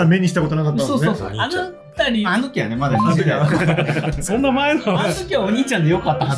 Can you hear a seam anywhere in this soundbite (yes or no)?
yes